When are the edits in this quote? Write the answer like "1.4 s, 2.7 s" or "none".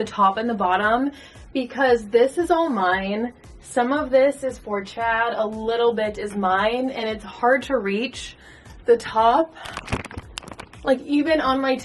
none

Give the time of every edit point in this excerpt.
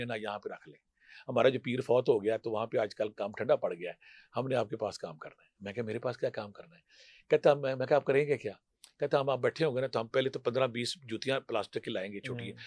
none

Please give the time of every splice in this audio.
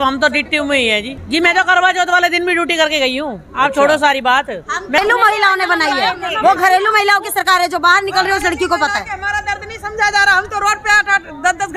1.2 s, 5.0 s

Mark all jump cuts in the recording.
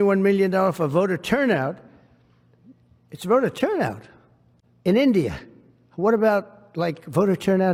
none

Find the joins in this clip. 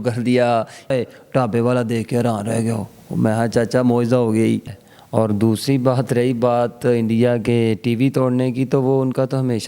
0.9 s, 4.8 s

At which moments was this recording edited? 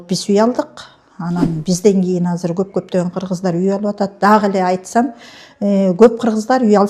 none

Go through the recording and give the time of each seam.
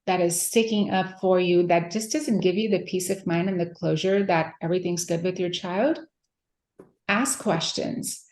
none

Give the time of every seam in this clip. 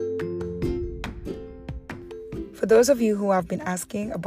1.9 s

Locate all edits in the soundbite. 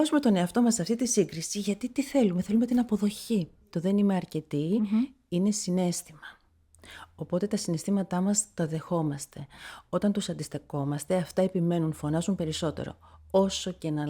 3.7 s

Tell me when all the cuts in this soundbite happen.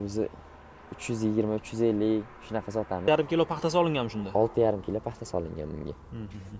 3.0 s

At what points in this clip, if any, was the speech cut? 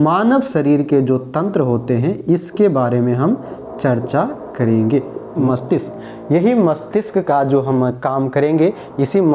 5.4 s

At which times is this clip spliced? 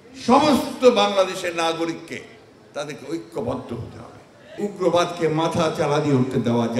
4.5 s

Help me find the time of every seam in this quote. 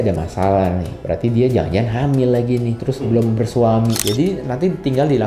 4.0 s

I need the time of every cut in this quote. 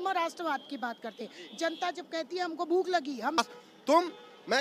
3.4 s

